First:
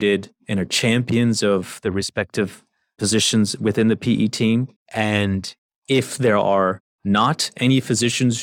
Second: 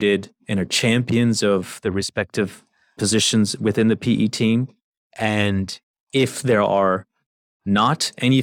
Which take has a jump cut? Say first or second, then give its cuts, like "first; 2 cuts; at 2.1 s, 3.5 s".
first; 2 cuts; at 4.8 s, 6.9 s